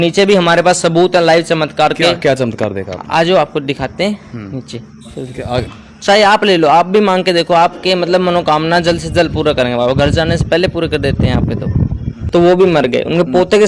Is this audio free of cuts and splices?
no; 2 cuts; at 5.6 s, 12.1 s

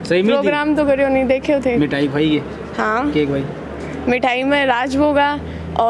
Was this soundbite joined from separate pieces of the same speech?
no; 0 cuts

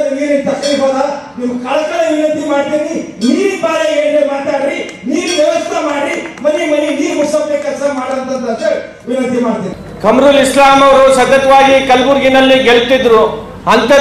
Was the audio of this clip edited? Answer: yes; 1 cut; at 9.8 s

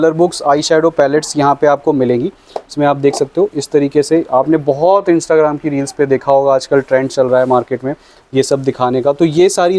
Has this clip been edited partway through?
no; 0 cuts

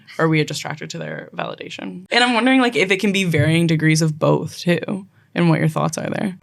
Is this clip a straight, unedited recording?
yes; 0 cuts

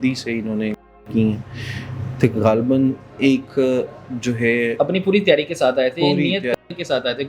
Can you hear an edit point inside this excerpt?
no; 0 cuts

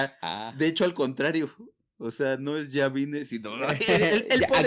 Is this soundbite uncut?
yes; 0 cuts

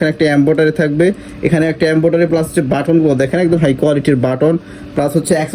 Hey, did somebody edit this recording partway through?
no; 0 cuts

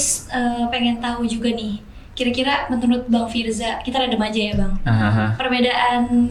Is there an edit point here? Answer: no; 0 cuts

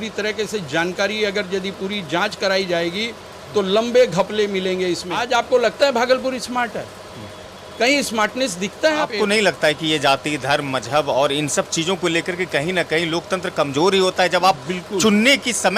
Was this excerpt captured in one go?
no; 2 cuts; at 5.1 s, 9.1 s

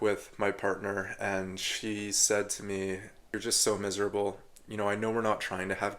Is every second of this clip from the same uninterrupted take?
no; 1 cut; at 3.3 s

